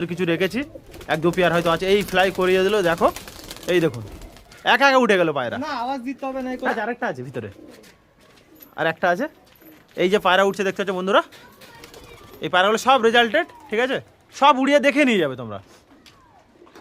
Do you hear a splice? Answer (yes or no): no